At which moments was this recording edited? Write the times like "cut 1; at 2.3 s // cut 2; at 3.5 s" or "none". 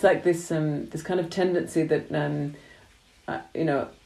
none